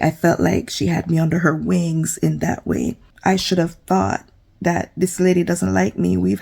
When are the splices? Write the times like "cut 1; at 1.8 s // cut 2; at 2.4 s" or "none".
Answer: cut 1; at 3.1 s